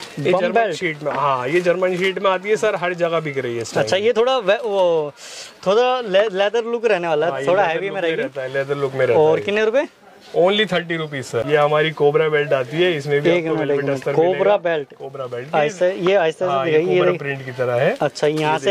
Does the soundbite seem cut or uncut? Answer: uncut